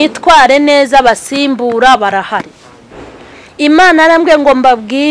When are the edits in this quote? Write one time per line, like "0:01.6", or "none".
none